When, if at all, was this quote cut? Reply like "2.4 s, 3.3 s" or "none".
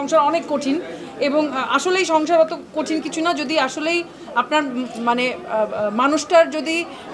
none